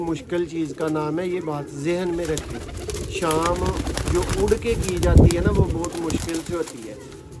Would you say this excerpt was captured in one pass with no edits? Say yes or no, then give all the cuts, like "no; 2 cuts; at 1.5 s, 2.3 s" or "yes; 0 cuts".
yes; 0 cuts